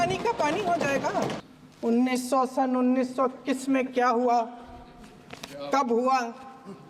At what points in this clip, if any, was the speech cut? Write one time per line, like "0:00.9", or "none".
0:01.4